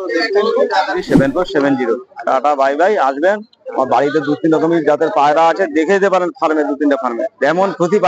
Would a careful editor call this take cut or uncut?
cut